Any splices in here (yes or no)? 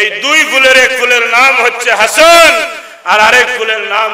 no